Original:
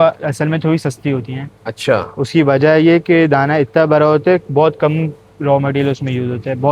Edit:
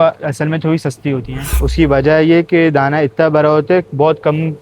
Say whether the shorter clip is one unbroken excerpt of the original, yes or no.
no